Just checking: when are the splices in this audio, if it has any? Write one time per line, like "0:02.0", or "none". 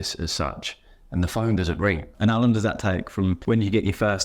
0:02.1